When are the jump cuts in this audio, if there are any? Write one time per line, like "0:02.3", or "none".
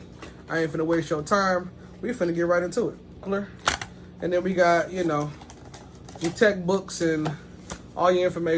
0:03.3

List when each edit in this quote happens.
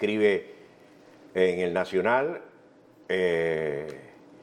0:02.0

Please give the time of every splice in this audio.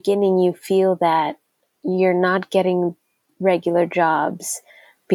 none

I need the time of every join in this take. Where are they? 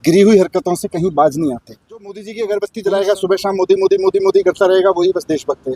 0:02.3

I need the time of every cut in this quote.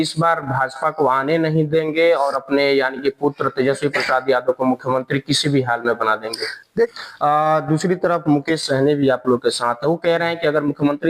0:06.9

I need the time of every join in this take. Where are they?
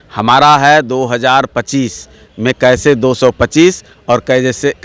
none

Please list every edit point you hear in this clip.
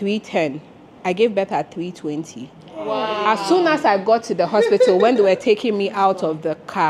none

